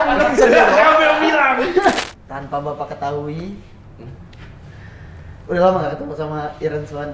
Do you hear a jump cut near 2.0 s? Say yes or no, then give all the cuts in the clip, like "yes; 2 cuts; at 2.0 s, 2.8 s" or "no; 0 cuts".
yes; 1 cut; at 2.0 s